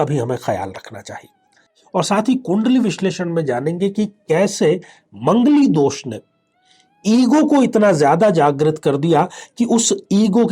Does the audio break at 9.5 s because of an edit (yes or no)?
no